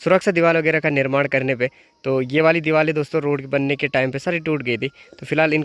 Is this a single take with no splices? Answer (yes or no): yes